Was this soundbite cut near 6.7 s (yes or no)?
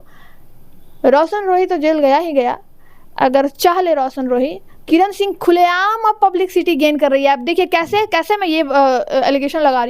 no